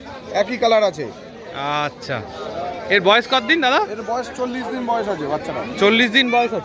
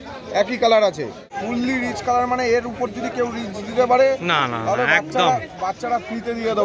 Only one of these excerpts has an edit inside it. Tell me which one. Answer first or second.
second